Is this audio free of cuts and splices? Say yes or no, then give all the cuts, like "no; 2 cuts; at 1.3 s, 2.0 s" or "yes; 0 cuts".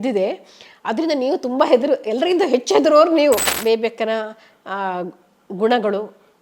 no; 1 cut; at 3.5 s